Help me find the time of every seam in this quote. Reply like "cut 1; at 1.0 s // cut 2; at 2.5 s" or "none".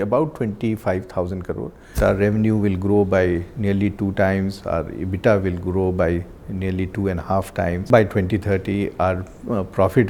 cut 1; at 2.0 s // cut 2; at 7.9 s